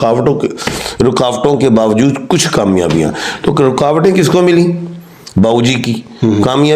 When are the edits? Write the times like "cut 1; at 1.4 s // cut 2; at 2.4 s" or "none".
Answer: none